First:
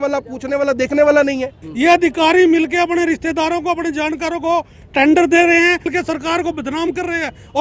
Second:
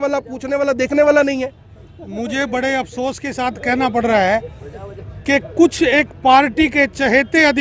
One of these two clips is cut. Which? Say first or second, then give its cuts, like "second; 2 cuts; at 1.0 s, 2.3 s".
first; 2 cuts; at 1.6 s, 5.9 s